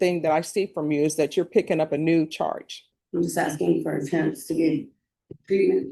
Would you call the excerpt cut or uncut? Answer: cut